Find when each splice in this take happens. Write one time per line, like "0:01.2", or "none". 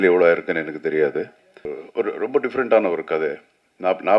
0:01.8